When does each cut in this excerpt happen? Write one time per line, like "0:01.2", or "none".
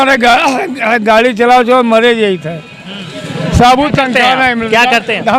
none